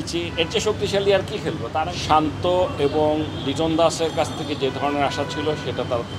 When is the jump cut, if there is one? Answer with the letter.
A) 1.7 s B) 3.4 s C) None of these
A